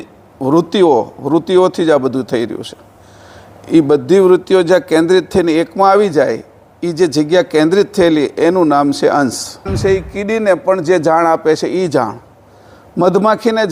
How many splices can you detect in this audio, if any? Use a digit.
1